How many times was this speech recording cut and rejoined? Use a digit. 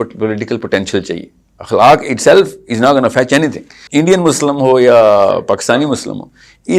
1